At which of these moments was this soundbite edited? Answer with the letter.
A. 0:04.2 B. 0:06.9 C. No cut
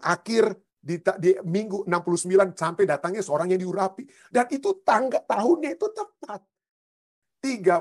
B